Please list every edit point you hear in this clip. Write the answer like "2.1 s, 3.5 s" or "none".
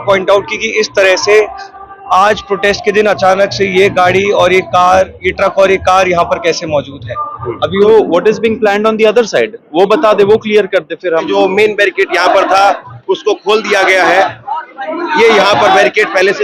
7.8 s, 11.3 s